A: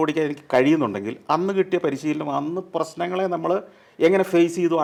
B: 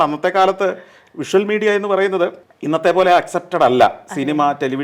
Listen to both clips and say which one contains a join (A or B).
B